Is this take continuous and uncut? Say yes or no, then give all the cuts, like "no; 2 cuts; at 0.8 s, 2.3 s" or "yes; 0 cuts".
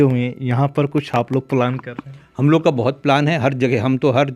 yes; 0 cuts